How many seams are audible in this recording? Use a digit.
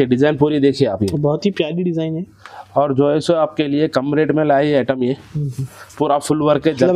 0